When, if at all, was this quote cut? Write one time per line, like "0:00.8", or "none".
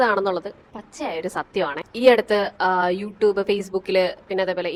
none